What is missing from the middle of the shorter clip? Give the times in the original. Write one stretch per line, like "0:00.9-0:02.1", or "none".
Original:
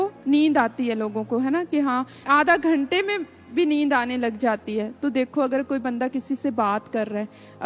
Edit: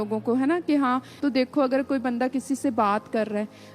0:02.2-0:04.9